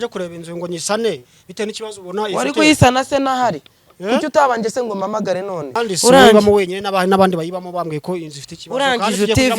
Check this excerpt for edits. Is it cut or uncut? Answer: cut